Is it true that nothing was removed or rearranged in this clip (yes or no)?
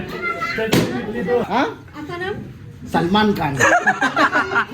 no